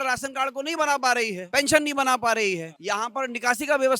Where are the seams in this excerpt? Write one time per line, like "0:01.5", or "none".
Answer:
0:01.4
0:02.7